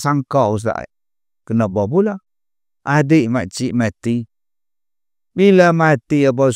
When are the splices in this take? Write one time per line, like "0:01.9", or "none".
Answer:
none